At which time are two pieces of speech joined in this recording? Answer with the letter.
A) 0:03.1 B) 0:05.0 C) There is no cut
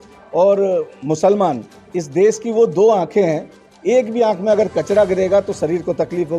A